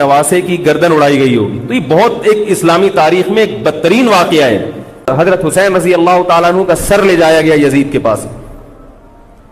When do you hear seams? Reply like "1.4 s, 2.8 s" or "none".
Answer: 5.1 s